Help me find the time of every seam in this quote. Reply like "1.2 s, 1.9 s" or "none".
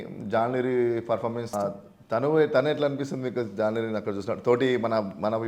1.5 s

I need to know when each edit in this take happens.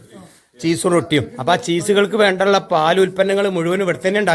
none

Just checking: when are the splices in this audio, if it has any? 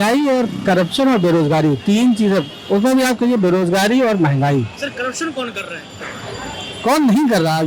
none

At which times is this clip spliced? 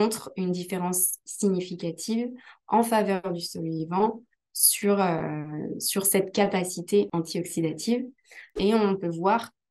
7.1 s, 8.5 s

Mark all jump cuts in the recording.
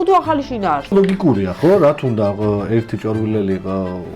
0.9 s

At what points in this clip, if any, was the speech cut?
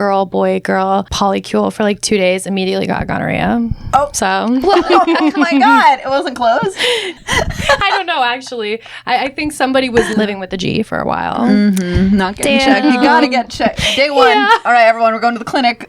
1.1 s, 7.2 s, 10.1 s

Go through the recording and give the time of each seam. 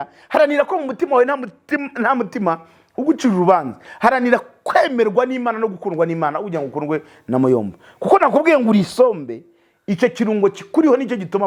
none

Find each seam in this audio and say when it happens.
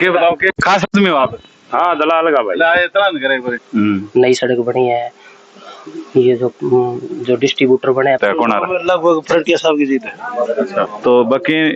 3.6 s, 8.2 s, 10.9 s

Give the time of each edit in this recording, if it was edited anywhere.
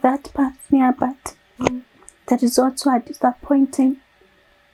none

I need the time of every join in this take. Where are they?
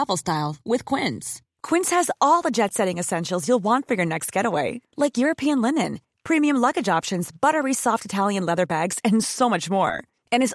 none

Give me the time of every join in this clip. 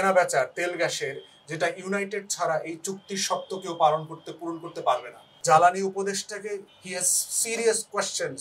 5.4 s

